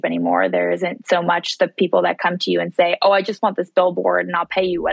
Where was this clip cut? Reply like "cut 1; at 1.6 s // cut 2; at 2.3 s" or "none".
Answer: none